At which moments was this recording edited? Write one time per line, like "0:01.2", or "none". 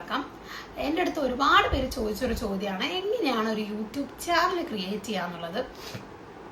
none